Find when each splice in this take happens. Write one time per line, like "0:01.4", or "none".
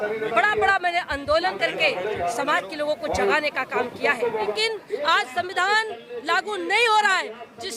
0:04.5